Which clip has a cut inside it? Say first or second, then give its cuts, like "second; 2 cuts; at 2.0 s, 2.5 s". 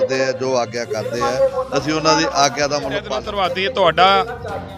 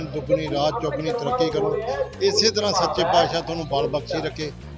first; 1 cut; at 3.1 s